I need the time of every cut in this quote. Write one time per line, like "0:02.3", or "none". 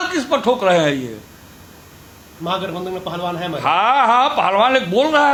none